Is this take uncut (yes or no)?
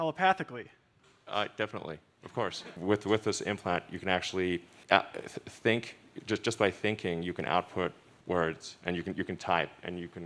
no